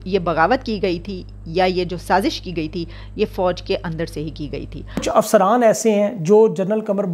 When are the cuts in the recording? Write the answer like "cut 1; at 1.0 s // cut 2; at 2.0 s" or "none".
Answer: cut 1; at 5.0 s